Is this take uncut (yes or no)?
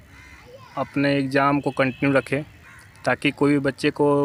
yes